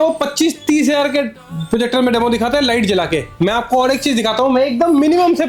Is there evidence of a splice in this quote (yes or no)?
no